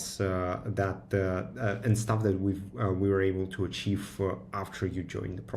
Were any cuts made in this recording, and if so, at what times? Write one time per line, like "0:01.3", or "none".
none